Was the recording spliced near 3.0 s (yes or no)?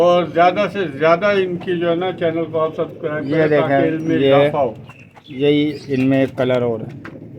no